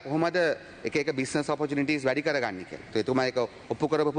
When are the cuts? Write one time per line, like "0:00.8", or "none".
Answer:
none